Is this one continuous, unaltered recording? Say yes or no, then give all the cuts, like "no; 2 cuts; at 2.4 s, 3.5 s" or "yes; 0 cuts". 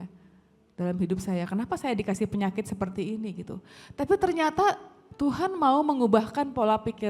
yes; 0 cuts